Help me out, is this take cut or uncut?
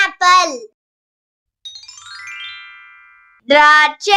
uncut